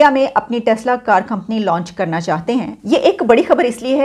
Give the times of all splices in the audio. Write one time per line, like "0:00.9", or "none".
0:02.8